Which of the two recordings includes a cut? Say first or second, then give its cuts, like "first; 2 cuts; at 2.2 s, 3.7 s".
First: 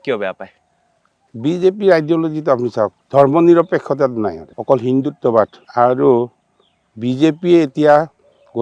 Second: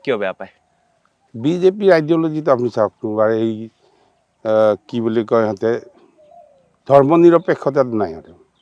first; 3 cuts; at 3.0 s, 4.5 s, 5.6 s